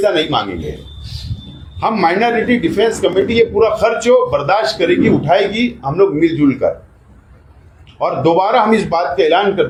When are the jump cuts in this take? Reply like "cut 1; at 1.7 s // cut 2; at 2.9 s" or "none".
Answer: none